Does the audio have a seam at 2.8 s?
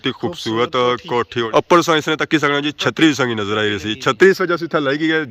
no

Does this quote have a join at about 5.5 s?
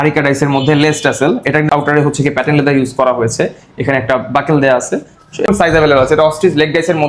yes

